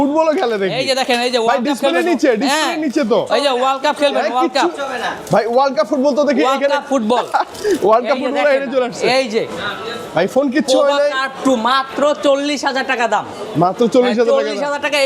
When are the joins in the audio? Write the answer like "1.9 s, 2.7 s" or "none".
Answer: none